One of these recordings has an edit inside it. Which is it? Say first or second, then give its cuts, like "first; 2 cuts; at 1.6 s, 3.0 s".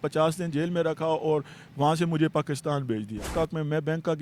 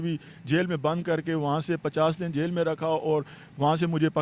first; 1 cut; at 3.3 s